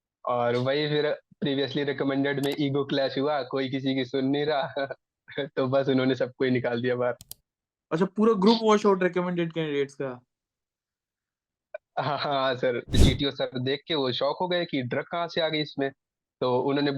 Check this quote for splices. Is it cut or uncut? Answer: cut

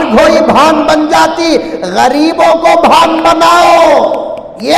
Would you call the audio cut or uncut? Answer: uncut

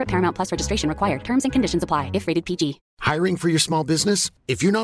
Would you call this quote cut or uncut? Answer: cut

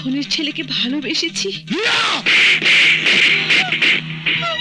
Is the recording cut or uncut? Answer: uncut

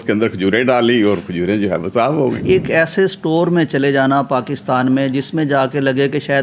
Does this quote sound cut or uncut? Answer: cut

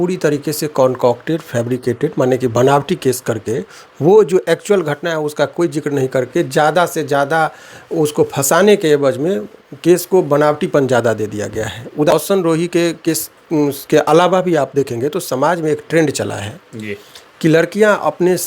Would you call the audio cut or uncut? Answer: cut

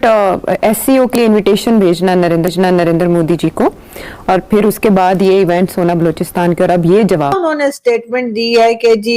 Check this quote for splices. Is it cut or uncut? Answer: cut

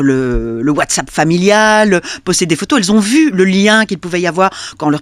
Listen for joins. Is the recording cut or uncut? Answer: uncut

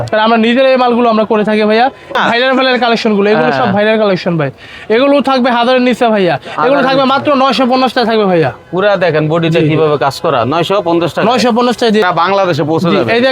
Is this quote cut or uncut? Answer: cut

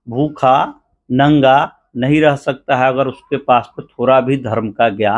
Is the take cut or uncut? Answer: uncut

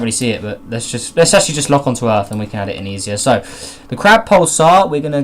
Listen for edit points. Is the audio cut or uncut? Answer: cut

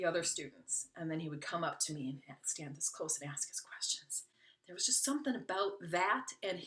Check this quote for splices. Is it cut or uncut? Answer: uncut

